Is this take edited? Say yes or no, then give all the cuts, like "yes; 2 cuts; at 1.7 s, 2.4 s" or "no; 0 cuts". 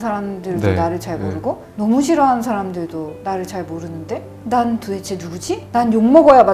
no; 0 cuts